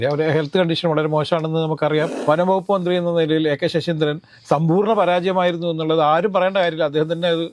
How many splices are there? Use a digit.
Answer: 1